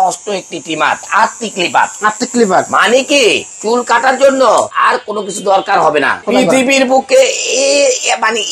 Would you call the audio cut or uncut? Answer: cut